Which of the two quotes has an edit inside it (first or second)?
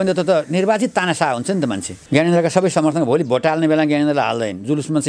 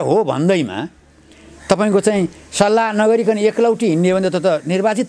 first